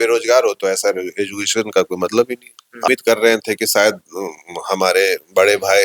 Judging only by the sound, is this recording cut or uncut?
cut